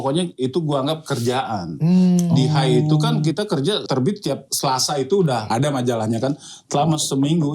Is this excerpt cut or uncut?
cut